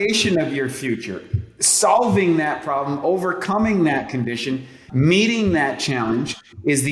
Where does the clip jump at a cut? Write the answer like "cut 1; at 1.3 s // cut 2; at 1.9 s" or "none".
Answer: cut 1; at 4.8 s